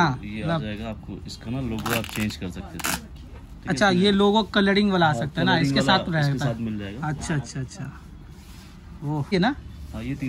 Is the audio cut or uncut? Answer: cut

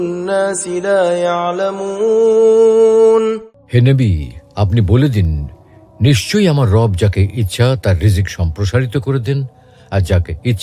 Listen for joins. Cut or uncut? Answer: cut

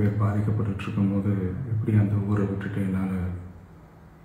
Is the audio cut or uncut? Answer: uncut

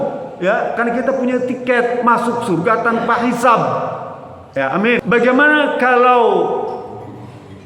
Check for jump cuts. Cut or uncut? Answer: cut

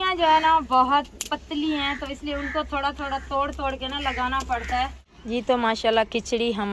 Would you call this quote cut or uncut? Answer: cut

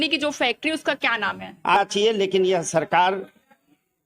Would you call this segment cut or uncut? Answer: cut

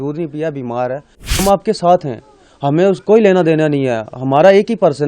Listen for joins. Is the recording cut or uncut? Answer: cut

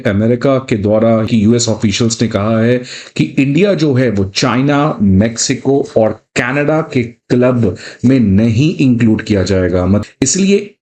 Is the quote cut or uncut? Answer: cut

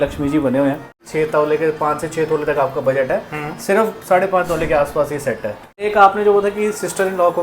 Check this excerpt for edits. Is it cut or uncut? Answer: cut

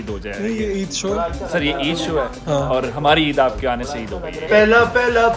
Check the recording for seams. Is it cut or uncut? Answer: cut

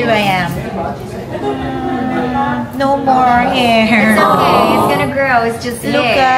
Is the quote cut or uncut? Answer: uncut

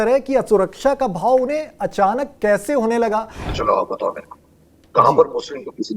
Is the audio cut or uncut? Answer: cut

